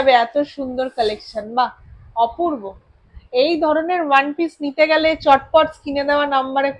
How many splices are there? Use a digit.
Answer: 0